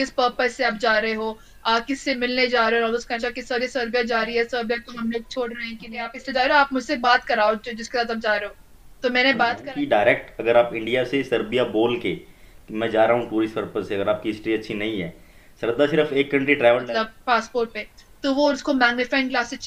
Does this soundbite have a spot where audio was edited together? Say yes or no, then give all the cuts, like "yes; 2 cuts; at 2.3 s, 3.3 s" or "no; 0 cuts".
yes; 4 cuts; at 3.1 s, 6.2 s, 9.6 s, 16.8 s